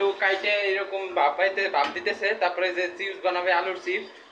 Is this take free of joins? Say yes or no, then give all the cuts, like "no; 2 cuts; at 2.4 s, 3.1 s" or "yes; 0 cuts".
yes; 0 cuts